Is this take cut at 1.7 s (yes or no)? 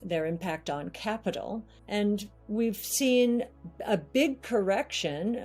yes